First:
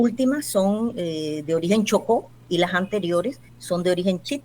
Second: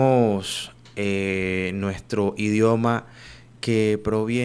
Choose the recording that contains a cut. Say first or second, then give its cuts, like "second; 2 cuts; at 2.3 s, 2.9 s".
first; 1 cut; at 3.5 s